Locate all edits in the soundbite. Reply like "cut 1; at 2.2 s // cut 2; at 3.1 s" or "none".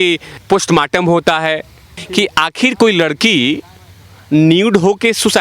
cut 1; at 2.0 s